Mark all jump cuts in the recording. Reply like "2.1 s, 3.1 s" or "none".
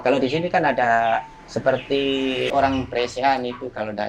2.5 s